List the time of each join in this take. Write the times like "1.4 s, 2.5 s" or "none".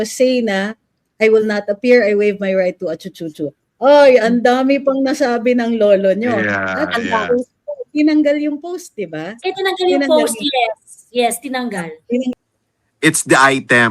12.3 s